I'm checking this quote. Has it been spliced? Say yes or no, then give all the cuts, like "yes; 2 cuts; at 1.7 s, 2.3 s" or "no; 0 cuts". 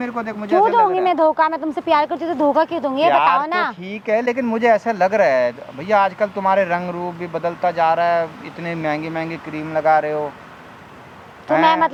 no; 0 cuts